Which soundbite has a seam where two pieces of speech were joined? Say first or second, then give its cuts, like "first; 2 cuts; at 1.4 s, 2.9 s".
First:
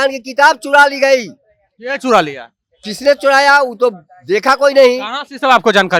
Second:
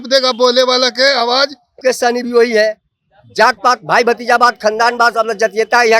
second; 1 cut; at 1.6 s